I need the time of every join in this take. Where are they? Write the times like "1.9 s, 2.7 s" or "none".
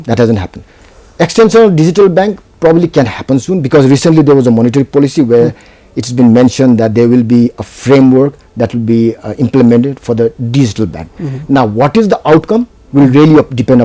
none